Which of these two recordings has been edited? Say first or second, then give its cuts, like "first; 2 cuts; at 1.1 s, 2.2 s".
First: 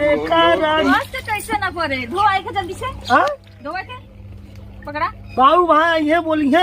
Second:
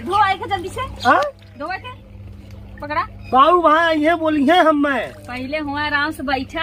first; 1 cut; at 0.9 s